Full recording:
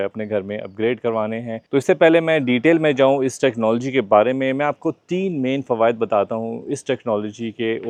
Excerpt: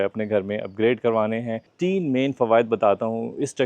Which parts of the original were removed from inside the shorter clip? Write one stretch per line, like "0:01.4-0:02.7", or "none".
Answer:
0:01.7-0:05.0